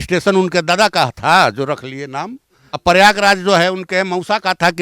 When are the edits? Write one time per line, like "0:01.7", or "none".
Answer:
0:02.8

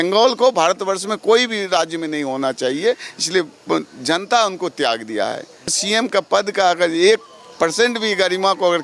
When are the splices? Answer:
0:05.8

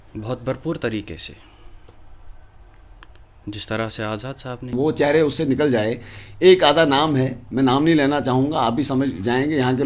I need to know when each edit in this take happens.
0:04.7

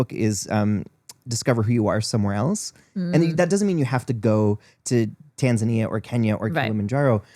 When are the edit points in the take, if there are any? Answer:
none

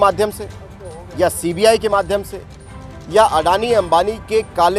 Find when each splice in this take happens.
none

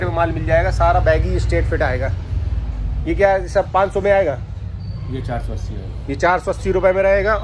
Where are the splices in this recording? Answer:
none

